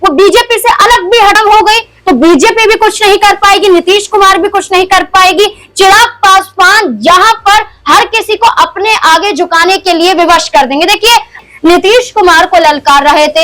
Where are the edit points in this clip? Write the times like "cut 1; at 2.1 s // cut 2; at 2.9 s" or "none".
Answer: cut 1; at 1.4 s // cut 2; at 11.3 s